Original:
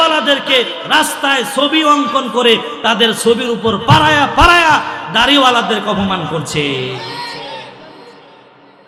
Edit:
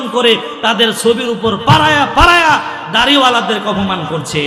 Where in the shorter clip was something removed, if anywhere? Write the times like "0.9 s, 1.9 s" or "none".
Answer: none